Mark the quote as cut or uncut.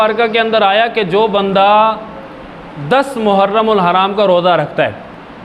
uncut